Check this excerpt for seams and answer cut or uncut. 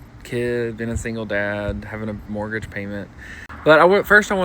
uncut